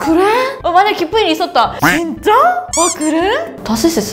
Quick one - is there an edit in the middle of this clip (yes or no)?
no